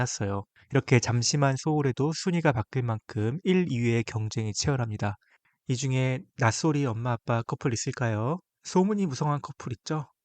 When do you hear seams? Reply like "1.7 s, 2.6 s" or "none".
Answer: 5.4 s